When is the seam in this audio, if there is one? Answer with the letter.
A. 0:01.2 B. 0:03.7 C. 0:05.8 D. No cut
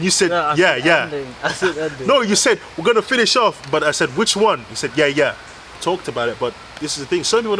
C